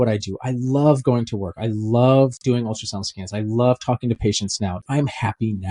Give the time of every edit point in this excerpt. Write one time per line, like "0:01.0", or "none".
0:04.8